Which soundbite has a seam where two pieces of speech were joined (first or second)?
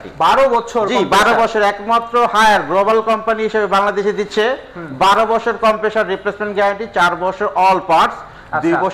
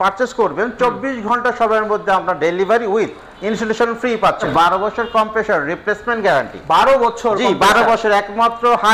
second